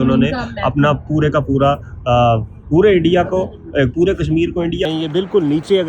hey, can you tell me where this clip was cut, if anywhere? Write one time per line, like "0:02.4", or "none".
0:04.9